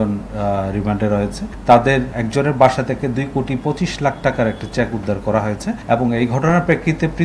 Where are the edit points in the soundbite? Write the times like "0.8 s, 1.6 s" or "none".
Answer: 1.5 s, 2.2 s, 5.8 s